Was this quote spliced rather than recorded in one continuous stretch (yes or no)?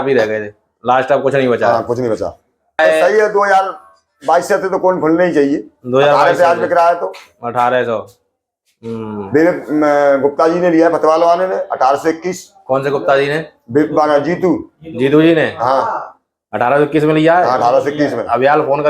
yes